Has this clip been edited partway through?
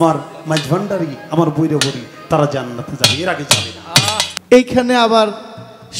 yes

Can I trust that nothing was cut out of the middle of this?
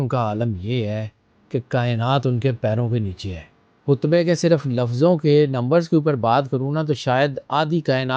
no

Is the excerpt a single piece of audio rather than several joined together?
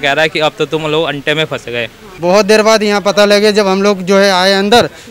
no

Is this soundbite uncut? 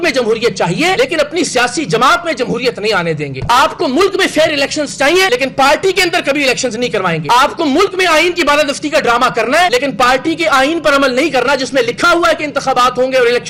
yes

